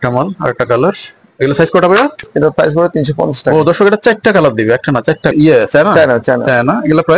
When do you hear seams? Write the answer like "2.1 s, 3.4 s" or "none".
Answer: 2.3 s, 5.3 s